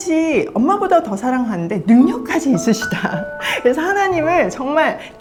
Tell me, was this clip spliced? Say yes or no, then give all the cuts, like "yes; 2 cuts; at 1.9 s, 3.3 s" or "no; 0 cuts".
no; 0 cuts